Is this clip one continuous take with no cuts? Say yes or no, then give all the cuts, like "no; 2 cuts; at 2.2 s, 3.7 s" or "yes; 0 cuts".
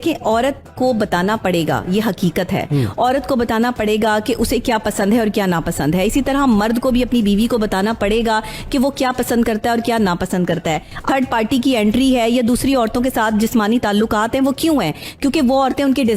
no; 1 cut; at 11.0 s